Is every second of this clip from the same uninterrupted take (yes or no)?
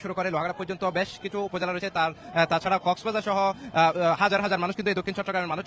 yes